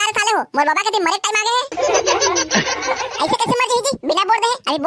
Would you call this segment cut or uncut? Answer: uncut